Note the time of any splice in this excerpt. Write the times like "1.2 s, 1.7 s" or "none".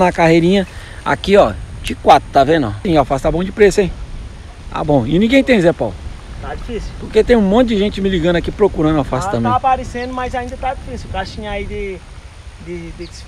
2.8 s